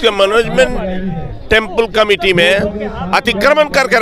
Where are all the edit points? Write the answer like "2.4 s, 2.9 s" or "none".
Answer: none

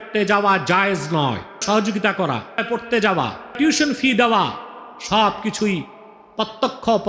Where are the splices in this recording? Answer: 1.6 s, 2.6 s, 3.5 s

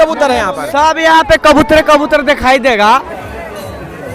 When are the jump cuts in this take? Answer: 3.1 s

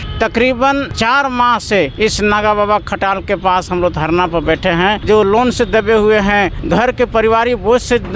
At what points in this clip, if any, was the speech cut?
0.9 s, 1.9 s, 5.0 s, 6.6 s

